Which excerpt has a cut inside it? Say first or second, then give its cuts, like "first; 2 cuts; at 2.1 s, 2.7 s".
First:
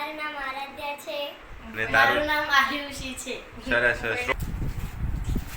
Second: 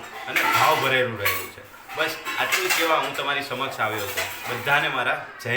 first; 1 cut; at 4.3 s